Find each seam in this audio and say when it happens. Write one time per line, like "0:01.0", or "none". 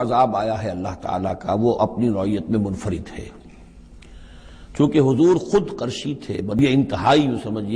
0:06.6